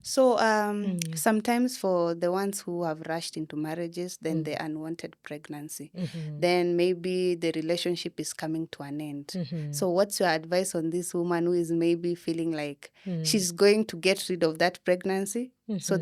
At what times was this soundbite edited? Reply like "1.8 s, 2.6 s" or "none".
none